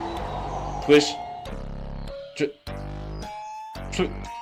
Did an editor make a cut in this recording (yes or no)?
no